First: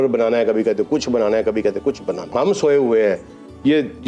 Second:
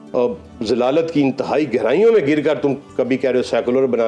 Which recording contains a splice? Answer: first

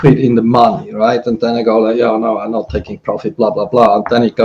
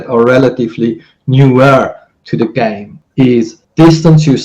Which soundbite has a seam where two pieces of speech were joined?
second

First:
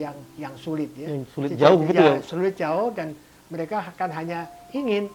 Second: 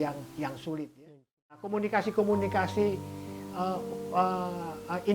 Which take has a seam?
second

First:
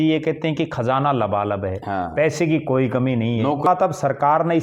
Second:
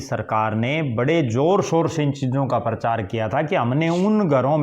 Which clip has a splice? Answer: first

